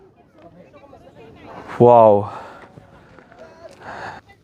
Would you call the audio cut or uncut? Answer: uncut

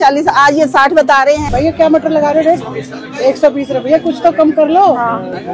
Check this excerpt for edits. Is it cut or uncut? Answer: cut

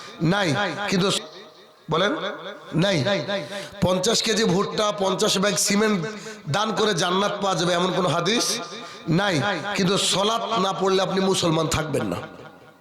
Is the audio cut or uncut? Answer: cut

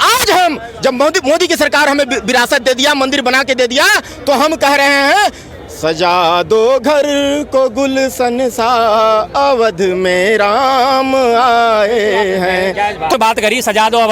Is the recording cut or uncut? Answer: cut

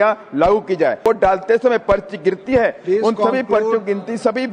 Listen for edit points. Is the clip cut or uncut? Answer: cut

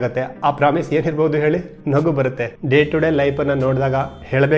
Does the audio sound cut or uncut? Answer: cut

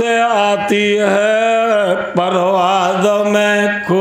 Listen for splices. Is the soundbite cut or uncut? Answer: uncut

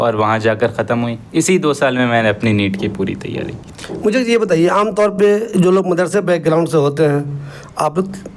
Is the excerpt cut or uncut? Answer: uncut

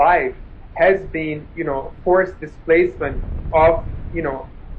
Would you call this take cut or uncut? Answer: uncut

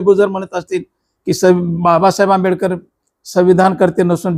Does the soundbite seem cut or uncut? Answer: uncut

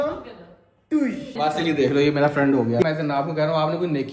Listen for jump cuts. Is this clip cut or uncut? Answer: cut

